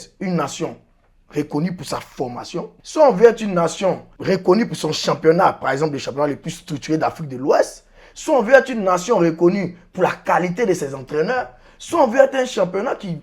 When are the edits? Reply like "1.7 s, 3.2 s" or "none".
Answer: 2.8 s, 4.1 s